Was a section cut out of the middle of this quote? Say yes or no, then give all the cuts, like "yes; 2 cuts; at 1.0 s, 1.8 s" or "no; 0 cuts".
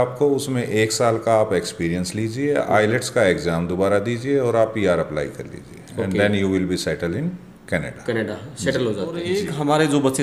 yes; 1 cut; at 9.2 s